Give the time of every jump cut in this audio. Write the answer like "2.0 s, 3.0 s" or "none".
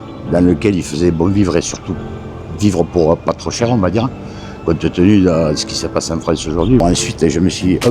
6.8 s